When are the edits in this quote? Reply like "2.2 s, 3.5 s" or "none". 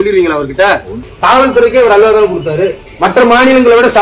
1.1 s